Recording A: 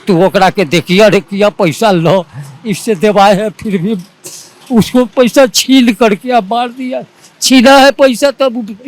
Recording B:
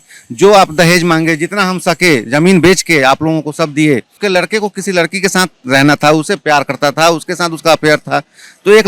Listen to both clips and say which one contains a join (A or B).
B